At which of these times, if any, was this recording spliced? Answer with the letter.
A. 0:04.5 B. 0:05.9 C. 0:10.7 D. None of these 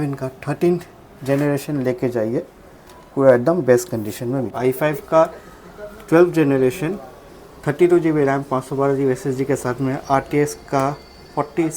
A